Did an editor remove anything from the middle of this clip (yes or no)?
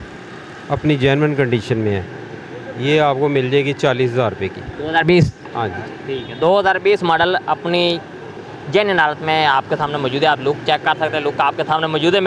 no